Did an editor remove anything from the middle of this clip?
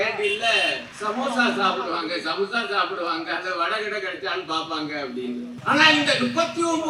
yes; 2 cuts; at 0.9 s, 5.6 s

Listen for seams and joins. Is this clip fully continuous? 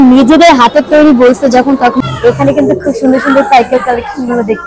no; 1 cut; at 2.0 s

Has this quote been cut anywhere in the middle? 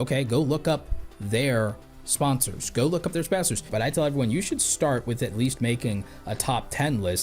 yes; 1 cut; at 3.7 s

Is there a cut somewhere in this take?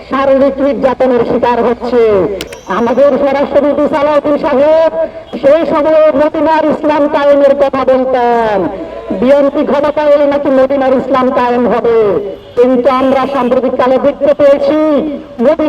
yes; 1 cut; at 2.5 s

